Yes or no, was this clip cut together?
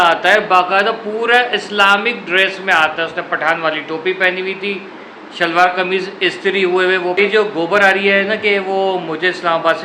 yes